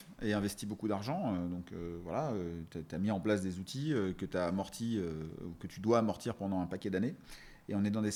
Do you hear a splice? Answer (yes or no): no